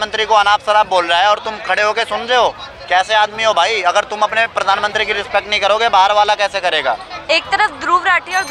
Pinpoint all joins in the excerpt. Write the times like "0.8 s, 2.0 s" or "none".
none